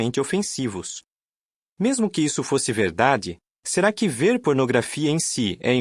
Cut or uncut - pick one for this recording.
uncut